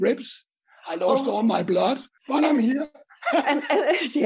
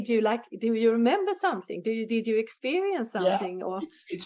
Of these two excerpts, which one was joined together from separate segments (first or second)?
first